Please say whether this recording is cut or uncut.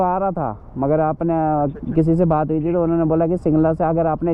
uncut